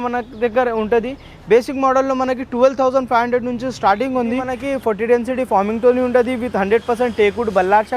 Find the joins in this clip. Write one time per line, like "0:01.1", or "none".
0:04.5